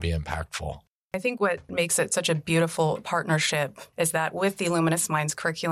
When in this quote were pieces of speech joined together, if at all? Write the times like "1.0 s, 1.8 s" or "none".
1.1 s, 3.8 s